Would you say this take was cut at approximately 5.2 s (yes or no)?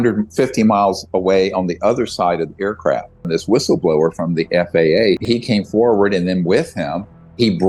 yes